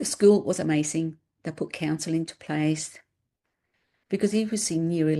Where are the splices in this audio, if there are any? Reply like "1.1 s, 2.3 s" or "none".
none